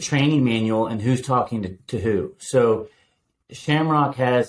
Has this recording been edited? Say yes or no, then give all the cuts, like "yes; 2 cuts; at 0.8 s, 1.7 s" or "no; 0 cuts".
no; 0 cuts